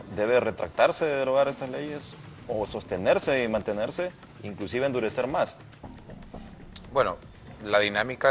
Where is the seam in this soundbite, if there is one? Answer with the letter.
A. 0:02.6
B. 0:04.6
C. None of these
C